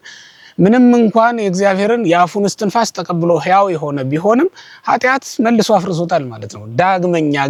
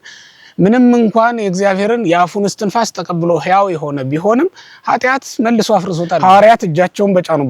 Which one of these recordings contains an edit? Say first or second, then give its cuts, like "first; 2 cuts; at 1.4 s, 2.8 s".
second; 1 cut; at 6.2 s